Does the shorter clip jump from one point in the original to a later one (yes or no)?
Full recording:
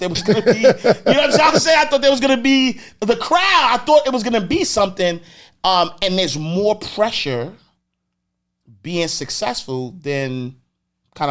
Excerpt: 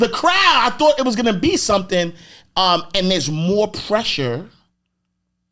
no